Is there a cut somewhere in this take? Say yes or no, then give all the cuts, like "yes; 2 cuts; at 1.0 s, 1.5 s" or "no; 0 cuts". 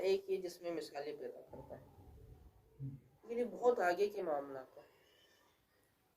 yes; 1 cut; at 2.8 s